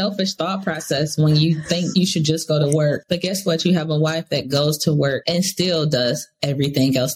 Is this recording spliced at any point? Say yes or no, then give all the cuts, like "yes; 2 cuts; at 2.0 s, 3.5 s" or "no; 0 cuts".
yes; 3 cuts; at 1.9 s, 3.0 s, 5.2 s